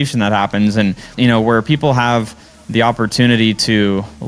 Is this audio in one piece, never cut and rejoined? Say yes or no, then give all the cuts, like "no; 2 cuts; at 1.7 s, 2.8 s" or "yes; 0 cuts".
no; 1 cut; at 1.1 s